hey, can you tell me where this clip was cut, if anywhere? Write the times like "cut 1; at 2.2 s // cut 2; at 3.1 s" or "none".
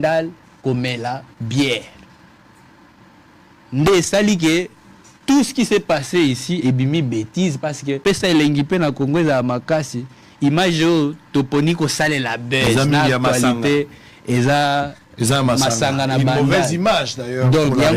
cut 1; at 8.0 s